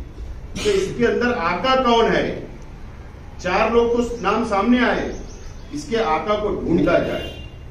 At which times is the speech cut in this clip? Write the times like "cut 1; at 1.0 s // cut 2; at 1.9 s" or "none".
cut 1; at 6.8 s